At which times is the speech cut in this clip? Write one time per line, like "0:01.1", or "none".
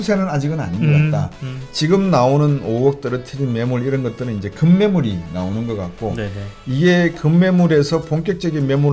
none